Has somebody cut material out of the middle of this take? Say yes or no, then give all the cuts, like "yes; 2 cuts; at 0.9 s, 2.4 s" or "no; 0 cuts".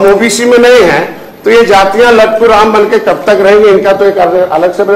no; 0 cuts